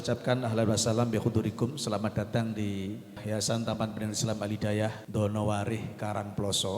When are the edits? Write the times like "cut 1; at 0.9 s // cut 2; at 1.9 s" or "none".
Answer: cut 1; at 3.2 s // cut 2; at 5.0 s